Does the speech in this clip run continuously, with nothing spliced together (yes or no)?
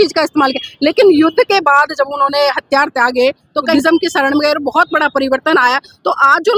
no